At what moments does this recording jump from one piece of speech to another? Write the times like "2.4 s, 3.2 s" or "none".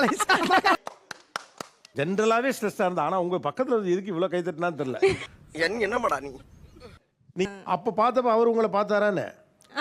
7.5 s